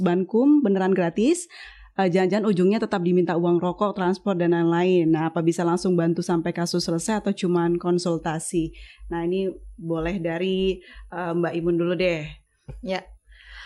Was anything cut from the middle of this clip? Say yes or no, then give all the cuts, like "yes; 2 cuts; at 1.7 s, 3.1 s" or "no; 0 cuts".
no; 0 cuts